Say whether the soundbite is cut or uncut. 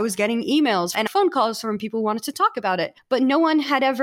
cut